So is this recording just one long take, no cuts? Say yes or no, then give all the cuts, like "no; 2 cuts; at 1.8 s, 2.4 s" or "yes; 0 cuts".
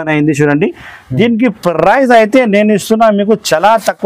yes; 0 cuts